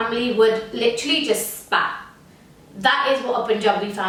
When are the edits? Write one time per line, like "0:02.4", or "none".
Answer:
none